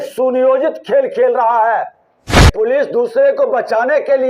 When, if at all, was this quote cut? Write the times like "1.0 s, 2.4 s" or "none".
2.5 s